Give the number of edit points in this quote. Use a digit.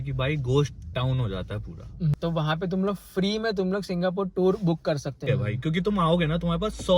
2